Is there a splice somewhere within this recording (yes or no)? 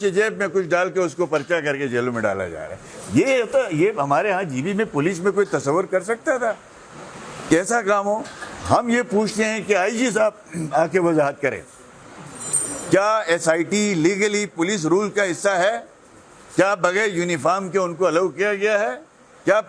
no